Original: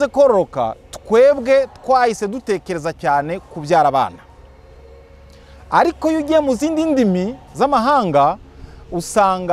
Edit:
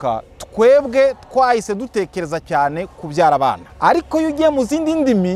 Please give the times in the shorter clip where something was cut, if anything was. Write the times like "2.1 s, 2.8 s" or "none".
3.7 s